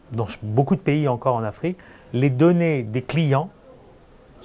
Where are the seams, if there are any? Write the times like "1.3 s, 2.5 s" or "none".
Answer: none